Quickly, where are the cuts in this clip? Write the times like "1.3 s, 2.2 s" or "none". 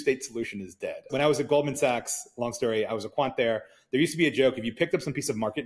1.0 s